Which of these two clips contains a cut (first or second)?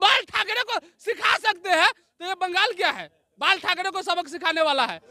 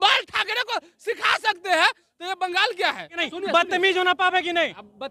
second